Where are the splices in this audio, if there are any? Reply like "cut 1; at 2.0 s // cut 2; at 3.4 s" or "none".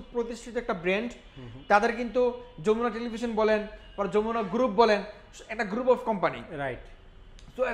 none